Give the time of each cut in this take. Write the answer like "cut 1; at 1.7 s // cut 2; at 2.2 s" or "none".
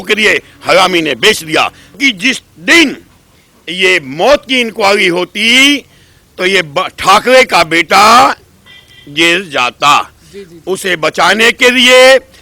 cut 1; at 2.0 s